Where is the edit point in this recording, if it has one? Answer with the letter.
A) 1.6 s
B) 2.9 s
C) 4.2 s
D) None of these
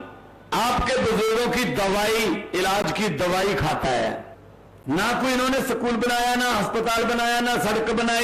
C